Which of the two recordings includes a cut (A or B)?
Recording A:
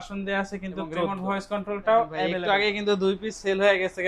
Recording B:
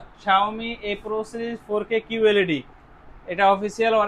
A